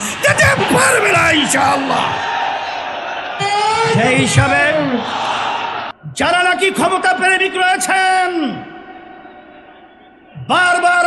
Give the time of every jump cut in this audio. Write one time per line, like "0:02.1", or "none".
0:05.9